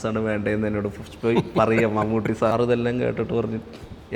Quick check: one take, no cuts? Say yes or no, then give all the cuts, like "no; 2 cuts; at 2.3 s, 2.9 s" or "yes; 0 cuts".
no; 1 cut; at 2.5 s